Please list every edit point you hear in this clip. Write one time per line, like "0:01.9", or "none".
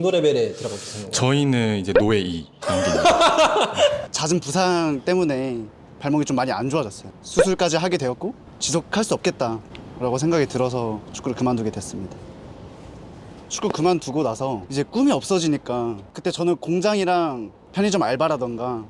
0:04.0
0:12.2
0:13.5
0:14.6
0:16.1

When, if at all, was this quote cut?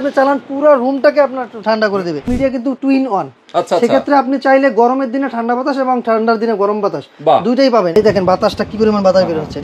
0:02.3
0:08.0

